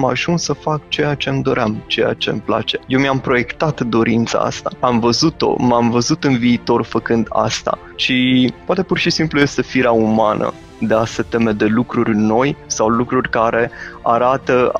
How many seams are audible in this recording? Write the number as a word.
five